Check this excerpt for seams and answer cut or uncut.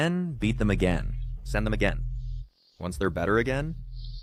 uncut